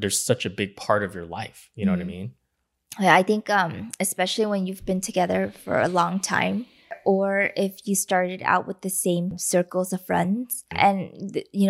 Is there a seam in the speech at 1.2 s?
no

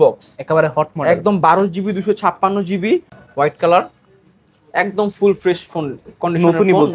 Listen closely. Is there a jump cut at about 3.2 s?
yes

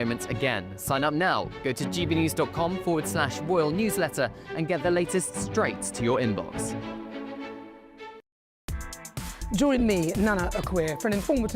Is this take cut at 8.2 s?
yes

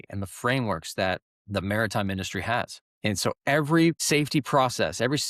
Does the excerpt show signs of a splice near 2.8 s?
yes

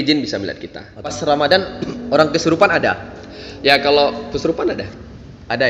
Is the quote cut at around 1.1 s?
yes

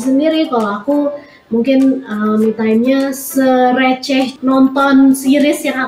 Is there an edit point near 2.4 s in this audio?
no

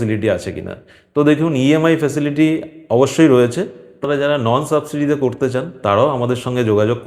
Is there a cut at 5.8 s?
no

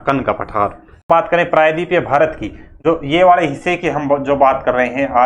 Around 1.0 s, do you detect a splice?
yes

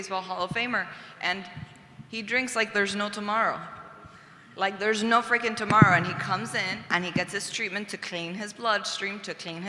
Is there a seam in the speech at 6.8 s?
yes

